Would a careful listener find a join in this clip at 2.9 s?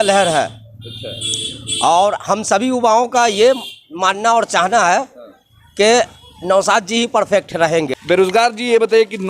no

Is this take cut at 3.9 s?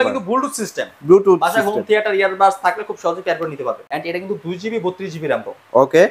yes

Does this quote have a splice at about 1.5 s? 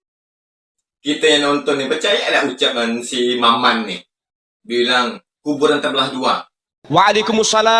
no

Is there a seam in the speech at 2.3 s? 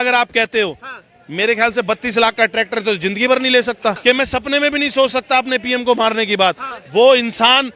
no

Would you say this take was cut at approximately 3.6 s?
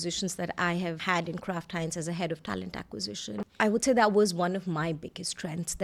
no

